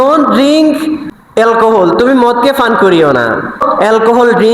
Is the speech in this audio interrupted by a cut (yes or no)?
yes